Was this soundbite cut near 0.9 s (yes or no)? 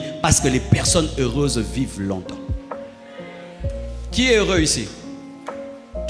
no